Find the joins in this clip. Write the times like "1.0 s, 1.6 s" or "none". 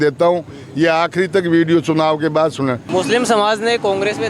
2.8 s